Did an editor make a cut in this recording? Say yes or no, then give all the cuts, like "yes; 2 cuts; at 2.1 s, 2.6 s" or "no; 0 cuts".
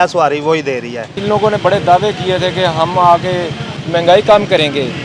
yes; 1 cut; at 1.2 s